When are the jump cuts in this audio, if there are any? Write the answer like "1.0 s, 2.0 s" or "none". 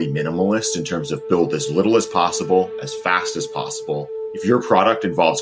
4.2 s